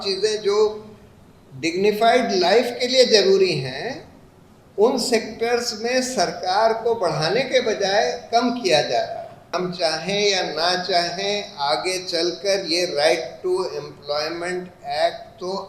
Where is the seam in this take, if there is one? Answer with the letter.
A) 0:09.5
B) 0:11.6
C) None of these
A